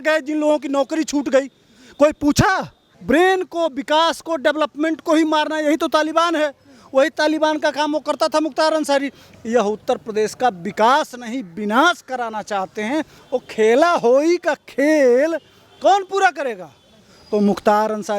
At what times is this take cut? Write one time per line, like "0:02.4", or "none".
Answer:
0:02.8
0:09.3
0:13.2